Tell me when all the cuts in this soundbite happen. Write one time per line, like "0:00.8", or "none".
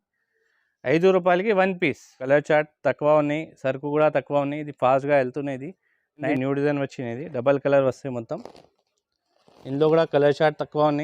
0:02.2
0:06.3